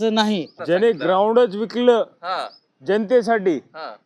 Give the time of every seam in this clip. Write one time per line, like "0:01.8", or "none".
0:01.0